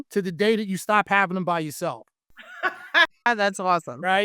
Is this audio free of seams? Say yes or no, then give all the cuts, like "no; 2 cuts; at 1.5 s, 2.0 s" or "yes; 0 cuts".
yes; 0 cuts